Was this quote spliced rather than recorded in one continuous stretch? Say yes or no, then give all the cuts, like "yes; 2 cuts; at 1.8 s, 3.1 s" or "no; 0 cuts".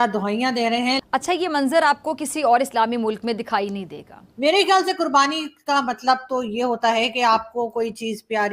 yes; 2 cuts; at 1.0 s, 4.1 s